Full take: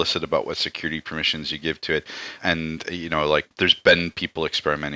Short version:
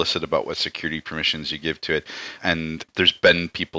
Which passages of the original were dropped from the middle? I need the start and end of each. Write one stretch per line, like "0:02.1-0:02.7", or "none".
0:02.9-0:03.5